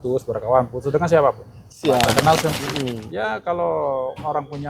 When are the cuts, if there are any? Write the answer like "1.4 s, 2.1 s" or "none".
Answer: 2.6 s